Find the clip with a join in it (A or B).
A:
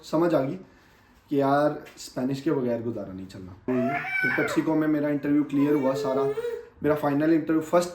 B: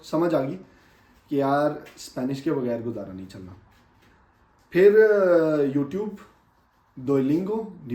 A